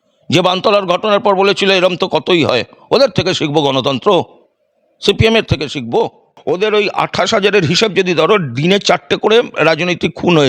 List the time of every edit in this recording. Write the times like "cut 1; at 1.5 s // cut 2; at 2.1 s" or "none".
cut 1; at 6.3 s